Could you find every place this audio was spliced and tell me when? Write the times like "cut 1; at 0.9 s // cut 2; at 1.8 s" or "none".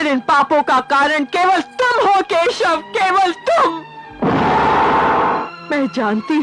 cut 1; at 5.4 s